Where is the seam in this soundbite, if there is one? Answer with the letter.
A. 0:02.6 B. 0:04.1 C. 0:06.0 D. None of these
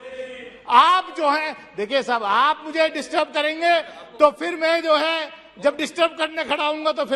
D